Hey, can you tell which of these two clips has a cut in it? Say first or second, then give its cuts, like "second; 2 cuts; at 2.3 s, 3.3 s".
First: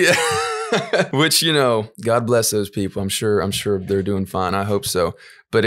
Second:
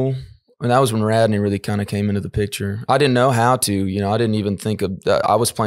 first; 2 cuts; at 1.1 s, 1.9 s